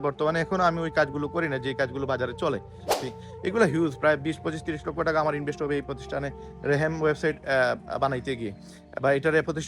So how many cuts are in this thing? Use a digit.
1